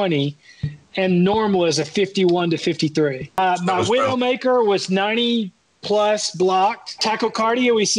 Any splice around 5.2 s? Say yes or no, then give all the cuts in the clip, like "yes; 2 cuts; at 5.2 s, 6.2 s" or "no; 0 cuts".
no; 2 cuts; at 3.4 s, 6.9 s